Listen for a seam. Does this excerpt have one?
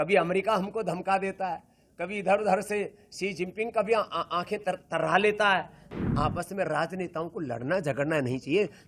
yes; 1 cut; at 5.8 s

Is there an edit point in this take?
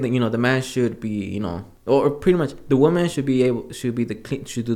yes; 1 cut; at 1.7 s

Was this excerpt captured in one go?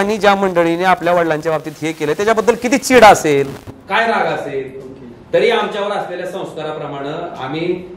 yes; 0 cuts

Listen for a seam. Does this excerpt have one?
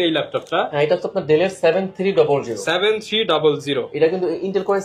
no; 0 cuts

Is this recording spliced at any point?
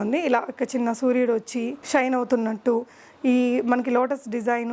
no; 0 cuts

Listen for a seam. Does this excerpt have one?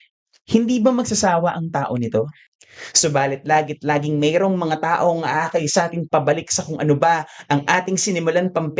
yes; 1 cut; at 2.4 s

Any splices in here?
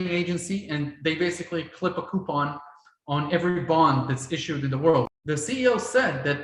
yes; 1 cut; at 5.1 s

